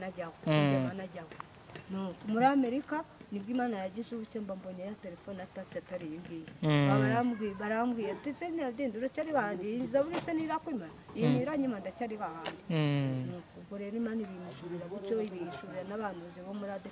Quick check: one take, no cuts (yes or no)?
yes